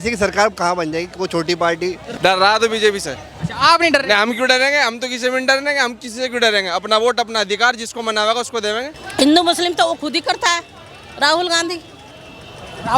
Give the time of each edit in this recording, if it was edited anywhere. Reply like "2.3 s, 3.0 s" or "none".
2.0 s, 9.0 s